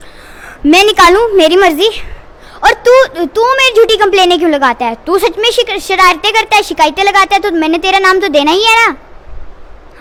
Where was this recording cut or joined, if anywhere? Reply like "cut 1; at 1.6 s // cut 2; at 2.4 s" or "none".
none